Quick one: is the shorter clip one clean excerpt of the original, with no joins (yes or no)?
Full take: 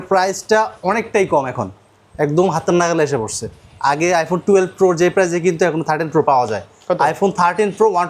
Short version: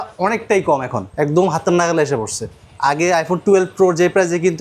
no